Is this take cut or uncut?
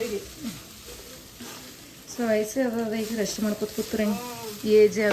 uncut